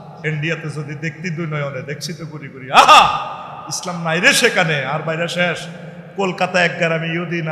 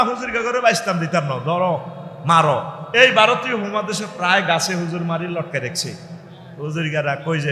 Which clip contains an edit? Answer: second; 1 cut; at 2.8 s

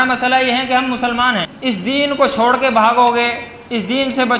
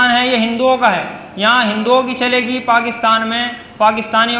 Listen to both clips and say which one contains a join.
first; 1 cut; at 1.5 s

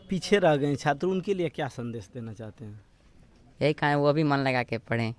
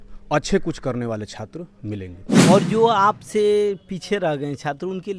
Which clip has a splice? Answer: second; 1 cut; at 2.2 s

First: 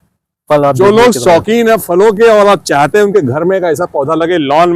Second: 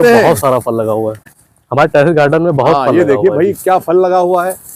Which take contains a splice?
second; 1 cut; at 1.4 s

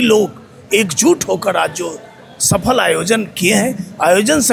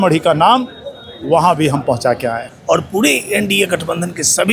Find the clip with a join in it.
second; 1 cut; at 2.5 s

